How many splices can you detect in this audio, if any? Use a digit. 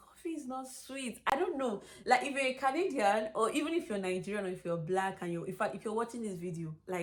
0